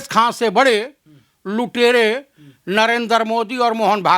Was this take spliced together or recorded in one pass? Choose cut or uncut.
uncut